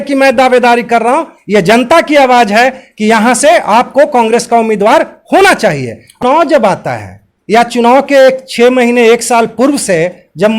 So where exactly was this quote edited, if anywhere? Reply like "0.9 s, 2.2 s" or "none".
6.1 s